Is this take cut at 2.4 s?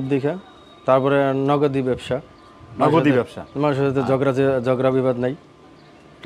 no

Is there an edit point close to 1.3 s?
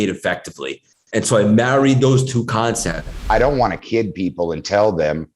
no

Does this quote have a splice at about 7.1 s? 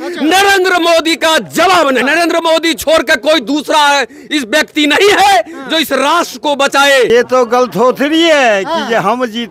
yes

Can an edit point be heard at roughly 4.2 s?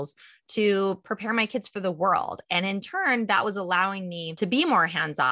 yes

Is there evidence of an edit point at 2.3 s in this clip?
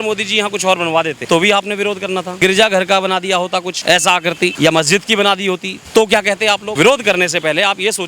yes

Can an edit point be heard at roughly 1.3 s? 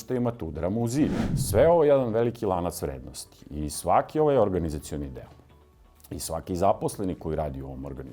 yes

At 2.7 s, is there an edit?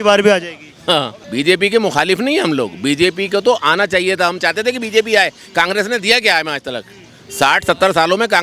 no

